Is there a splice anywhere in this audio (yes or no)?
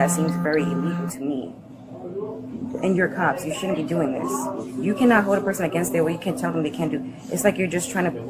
no